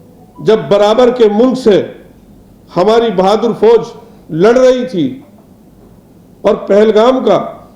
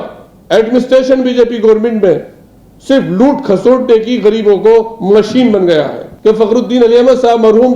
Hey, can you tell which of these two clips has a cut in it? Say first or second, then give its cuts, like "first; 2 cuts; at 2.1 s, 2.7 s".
second; 1 cut; at 6.0 s